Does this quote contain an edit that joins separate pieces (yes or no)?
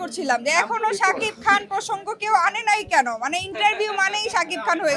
no